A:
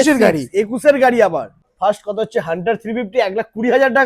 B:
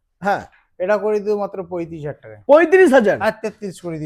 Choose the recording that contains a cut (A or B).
A